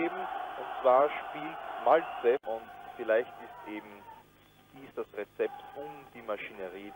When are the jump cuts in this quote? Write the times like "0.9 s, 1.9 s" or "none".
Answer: 2.4 s